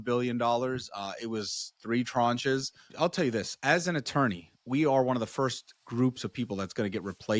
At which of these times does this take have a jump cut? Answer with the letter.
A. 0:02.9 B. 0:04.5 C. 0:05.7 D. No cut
A